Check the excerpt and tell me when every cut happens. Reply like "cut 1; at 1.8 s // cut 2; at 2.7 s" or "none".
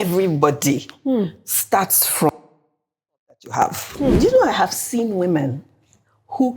cut 1; at 4.2 s